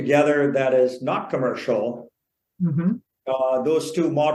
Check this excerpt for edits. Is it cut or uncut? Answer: uncut